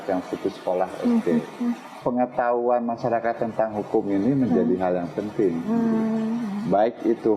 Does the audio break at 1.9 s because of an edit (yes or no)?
yes